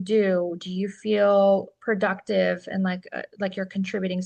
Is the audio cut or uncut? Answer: uncut